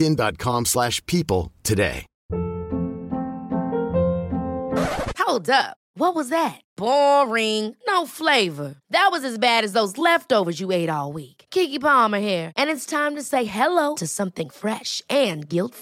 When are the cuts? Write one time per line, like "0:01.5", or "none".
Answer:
0:02.1